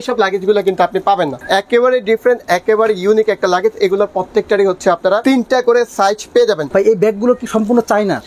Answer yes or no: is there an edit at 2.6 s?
no